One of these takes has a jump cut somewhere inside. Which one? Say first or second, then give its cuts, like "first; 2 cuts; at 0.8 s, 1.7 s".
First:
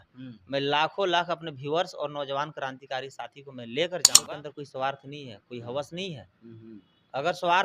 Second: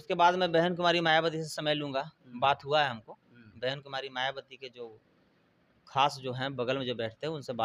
first; 1 cut; at 4.1 s